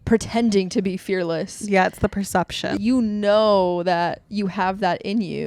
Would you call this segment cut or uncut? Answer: cut